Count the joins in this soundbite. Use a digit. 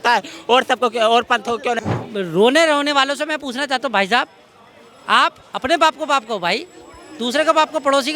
1